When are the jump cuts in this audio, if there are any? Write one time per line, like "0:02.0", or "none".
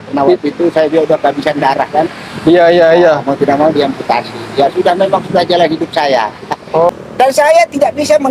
0:06.9